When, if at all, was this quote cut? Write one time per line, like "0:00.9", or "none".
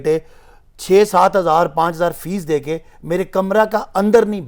none